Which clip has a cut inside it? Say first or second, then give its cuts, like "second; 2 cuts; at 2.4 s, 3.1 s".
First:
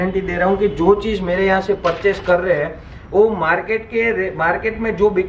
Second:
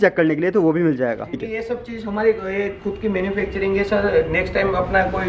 second; 1 cut; at 1.4 s